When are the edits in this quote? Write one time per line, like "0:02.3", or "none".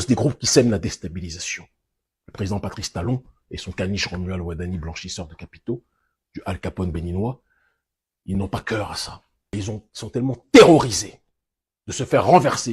0:09.6